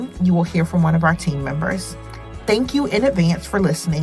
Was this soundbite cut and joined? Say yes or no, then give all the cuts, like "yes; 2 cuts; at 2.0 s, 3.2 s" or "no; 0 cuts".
no; 0 cuts